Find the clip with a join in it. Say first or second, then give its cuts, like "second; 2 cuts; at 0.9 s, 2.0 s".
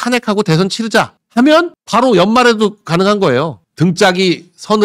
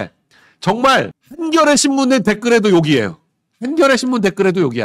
first; 1 cut; at 3.6 s